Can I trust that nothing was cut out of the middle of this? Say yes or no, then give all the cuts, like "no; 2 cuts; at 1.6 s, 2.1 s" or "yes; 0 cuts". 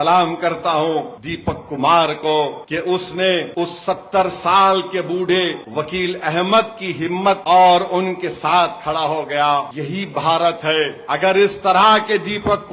yes; 0 cuts